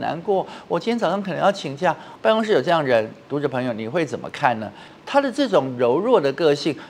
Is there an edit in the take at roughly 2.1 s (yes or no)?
yes